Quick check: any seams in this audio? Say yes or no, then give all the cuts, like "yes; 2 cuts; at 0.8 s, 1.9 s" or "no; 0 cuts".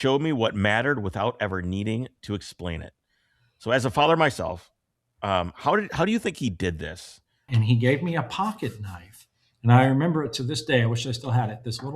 yes; 1 cut; at 7.4 s